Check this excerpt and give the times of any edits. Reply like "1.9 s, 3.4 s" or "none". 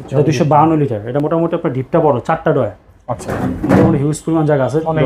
none